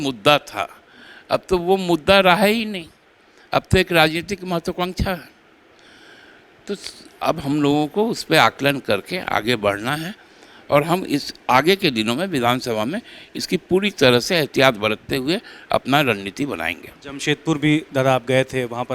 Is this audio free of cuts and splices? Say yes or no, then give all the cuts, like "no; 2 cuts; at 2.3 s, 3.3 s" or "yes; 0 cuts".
yes; 0 cuts